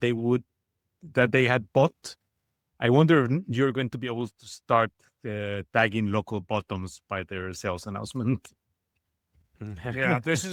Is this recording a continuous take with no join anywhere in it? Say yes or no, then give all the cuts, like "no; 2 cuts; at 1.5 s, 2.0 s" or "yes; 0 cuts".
yes; 0 cuts